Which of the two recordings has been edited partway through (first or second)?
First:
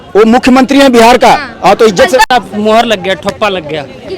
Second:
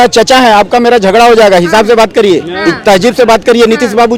first